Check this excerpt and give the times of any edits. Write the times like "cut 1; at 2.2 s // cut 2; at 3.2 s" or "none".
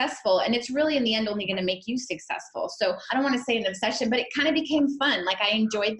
cut 1; at 3.0 s